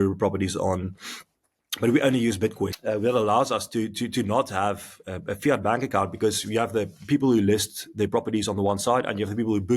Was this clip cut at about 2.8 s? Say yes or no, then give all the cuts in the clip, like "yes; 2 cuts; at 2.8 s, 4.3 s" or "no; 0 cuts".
yes; 1 cut; at 2.8 s